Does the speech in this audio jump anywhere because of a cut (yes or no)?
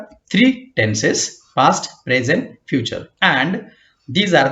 yes